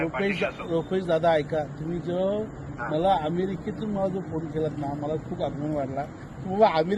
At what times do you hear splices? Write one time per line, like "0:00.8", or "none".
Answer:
none